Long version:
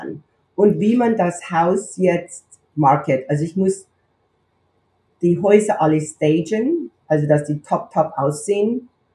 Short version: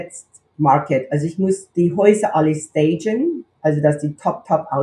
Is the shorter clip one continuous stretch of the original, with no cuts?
no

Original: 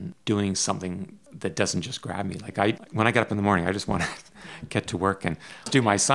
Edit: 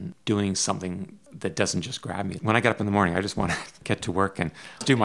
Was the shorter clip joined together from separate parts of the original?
yes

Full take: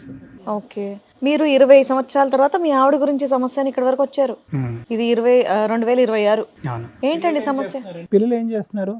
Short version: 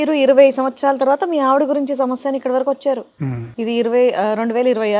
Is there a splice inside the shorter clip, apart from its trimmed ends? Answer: no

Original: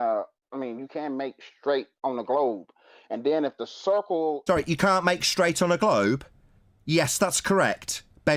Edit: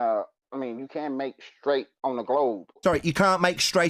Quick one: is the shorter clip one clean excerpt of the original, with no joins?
no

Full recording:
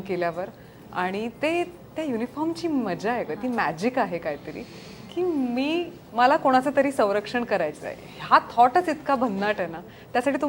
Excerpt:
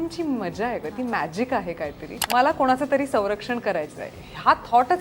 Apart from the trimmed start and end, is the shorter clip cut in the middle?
yes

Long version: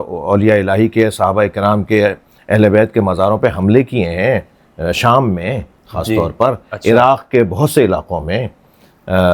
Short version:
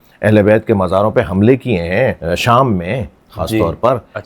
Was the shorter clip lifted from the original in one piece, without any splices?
no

